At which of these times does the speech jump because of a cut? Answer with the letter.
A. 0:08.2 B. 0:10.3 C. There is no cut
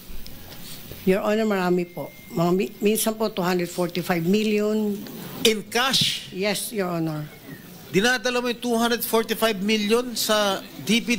A